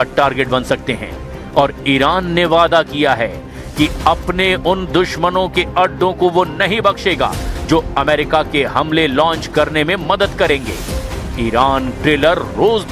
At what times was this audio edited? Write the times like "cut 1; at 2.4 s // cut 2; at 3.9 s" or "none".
cut 1; at 5.1 s